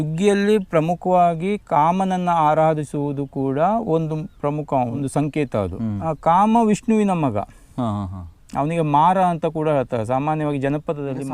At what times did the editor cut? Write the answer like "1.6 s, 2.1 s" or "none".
5.0 s, 6.0 s